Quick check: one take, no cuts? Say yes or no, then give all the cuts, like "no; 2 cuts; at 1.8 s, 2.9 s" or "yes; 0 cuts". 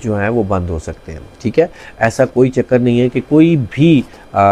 yes; 0 cuts